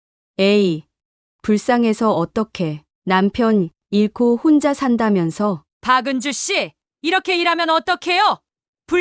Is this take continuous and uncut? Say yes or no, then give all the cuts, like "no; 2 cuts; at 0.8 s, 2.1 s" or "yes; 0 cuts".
no; 1 cut; at 5.7 s